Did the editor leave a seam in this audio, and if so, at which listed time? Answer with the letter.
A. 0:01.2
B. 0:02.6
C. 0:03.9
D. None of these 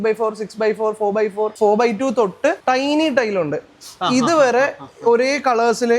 B